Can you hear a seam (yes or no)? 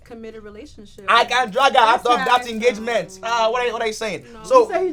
no